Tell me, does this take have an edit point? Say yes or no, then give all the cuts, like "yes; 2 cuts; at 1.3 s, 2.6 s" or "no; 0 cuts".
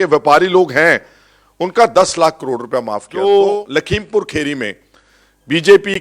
yes; 1 cut; at 3.0 s